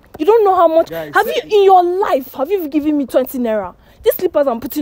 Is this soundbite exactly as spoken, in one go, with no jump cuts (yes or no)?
yes